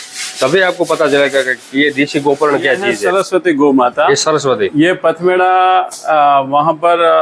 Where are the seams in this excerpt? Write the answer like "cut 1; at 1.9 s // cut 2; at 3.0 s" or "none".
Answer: cut 1; at 3.0 s